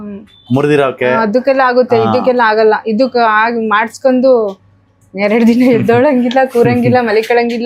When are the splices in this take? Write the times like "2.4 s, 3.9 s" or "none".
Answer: none